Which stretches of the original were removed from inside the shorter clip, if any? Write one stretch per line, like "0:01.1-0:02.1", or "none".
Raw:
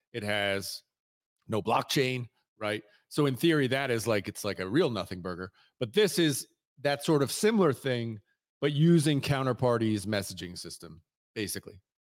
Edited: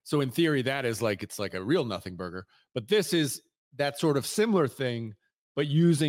none